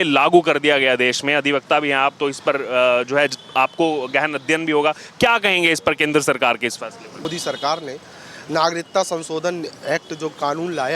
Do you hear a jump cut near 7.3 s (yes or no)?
yes